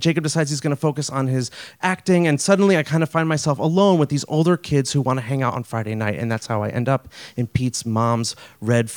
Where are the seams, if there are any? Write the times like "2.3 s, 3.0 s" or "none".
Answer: none